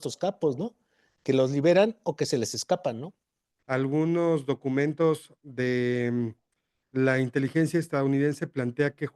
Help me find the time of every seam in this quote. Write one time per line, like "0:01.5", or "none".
0:03.2